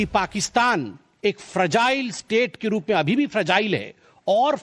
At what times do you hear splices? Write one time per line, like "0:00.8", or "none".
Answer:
0:01.0